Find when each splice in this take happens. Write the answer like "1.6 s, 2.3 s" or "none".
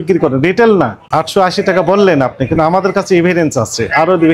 1.0 s